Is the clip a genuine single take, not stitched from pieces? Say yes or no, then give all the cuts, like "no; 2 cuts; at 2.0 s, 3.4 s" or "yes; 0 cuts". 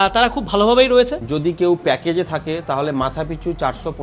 no; 1 cut; at 1.2 s